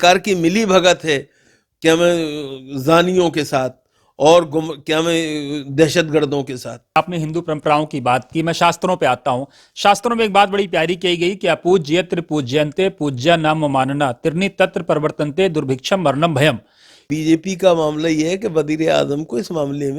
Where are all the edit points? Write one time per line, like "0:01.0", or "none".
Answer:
0:07.0
0:17.1